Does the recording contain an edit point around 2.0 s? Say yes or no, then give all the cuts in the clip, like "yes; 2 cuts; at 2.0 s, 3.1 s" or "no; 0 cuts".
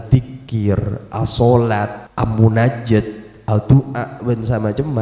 yes; 1 cut; at 2.0 s